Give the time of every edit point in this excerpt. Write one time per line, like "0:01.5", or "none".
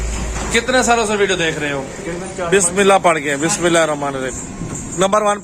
0:02.3